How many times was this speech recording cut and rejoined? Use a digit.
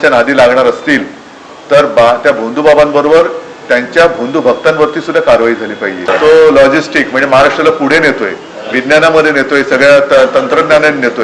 1